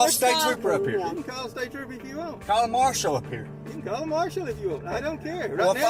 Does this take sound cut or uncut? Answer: uncut